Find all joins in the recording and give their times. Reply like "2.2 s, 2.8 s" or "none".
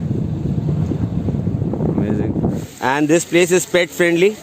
2.7 s